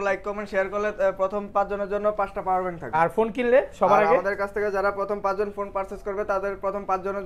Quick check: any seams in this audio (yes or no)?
yes